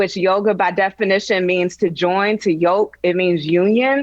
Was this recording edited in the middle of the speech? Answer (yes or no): yes